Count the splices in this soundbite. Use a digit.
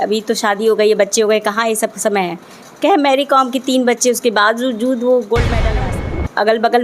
1